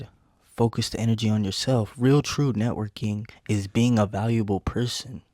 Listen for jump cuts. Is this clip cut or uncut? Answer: cut